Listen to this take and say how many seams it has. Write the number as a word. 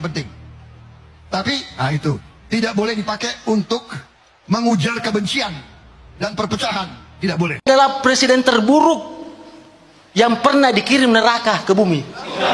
one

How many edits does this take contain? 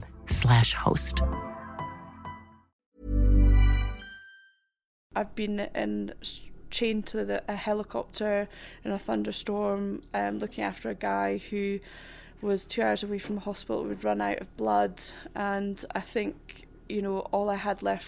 one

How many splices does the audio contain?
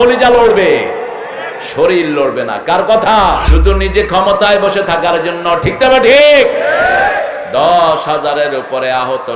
one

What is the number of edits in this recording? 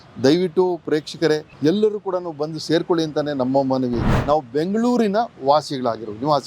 two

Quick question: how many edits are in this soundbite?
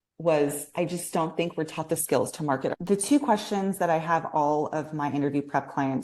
one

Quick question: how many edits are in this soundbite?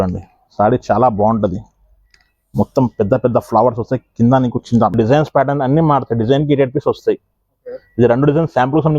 one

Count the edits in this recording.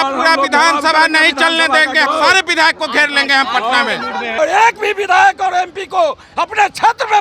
two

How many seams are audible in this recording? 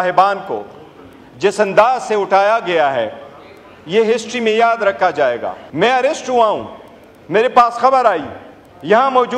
one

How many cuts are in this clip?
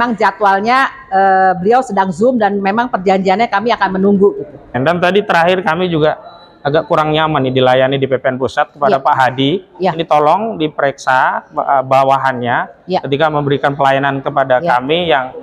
one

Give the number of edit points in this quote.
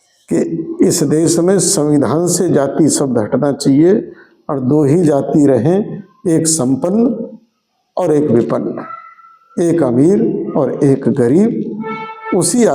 zero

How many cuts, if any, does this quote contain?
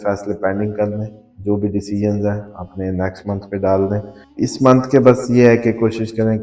one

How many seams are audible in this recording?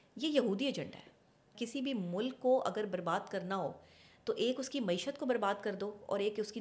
one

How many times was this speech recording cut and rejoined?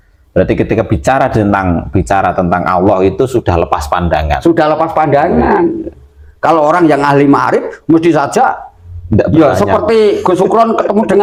zero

